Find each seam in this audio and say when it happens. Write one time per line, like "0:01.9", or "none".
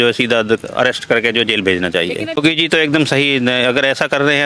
0:02.4